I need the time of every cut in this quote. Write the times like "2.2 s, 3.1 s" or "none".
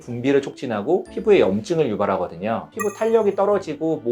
none